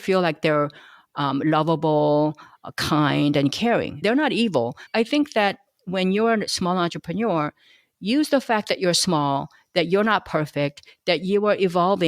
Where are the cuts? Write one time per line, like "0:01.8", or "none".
0:04.9